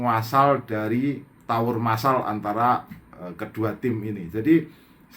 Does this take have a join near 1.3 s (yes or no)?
yes